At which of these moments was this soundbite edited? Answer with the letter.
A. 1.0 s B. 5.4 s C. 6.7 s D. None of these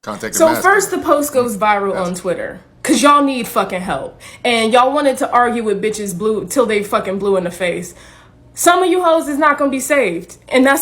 C